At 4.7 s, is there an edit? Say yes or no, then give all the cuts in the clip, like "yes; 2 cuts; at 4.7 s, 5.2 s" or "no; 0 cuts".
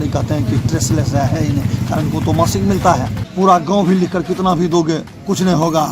no; 1 cut; at 3.2 s